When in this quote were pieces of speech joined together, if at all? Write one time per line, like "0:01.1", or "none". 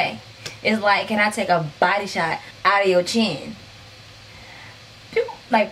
none